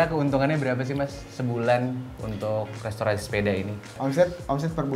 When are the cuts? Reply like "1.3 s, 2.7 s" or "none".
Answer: 4.0 s